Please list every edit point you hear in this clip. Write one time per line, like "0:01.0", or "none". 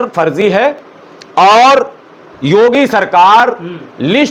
none